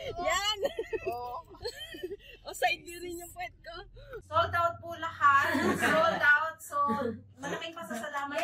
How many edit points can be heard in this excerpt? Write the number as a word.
one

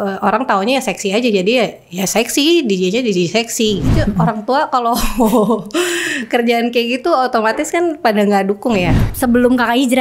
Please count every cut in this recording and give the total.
two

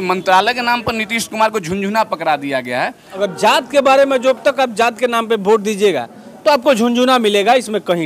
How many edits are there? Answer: one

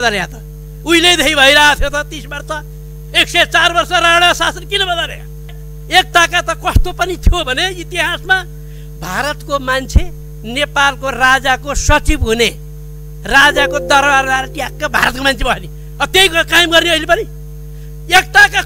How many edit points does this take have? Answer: one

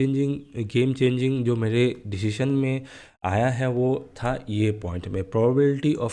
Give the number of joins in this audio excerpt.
zero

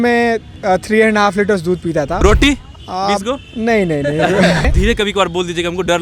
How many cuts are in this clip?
two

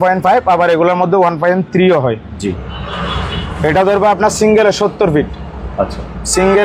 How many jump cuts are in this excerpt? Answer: one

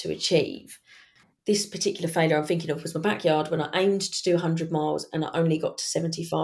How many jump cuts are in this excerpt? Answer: one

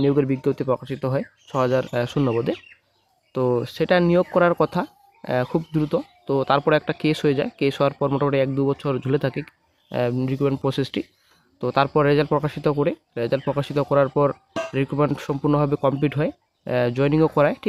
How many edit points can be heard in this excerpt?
zero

